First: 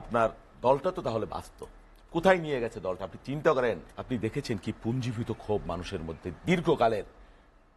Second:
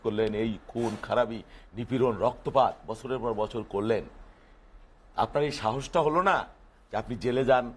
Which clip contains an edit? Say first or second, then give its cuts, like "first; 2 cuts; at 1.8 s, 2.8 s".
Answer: first; 1 cut; at 3.9 s